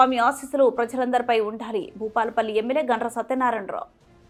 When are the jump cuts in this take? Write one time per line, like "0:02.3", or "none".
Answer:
none